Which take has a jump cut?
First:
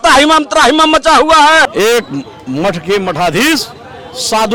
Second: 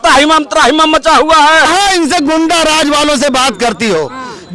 second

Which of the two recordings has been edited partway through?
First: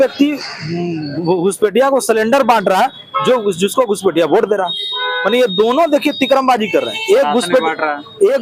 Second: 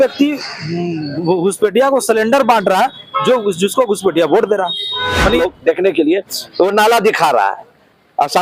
second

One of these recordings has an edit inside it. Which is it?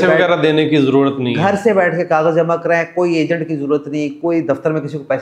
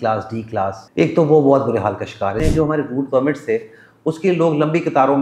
second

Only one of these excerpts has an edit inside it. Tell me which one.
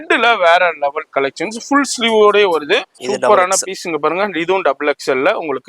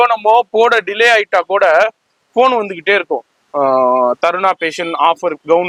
first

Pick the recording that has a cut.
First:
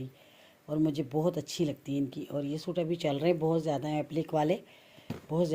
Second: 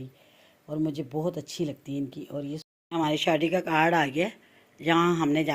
second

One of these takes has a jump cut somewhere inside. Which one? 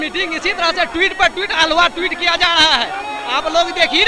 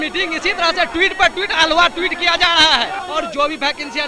second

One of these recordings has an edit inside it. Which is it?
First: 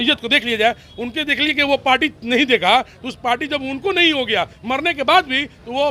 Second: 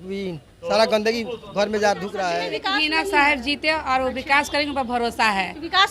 second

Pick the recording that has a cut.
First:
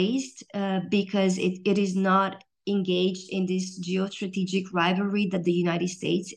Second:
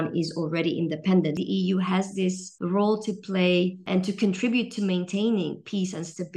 second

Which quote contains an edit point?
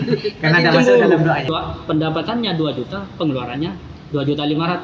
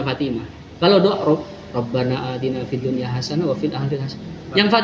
first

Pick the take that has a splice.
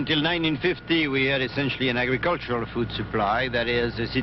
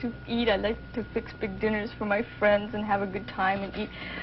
second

